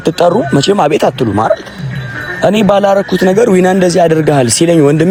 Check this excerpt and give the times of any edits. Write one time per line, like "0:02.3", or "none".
none